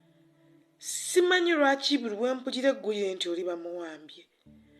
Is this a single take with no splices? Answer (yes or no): no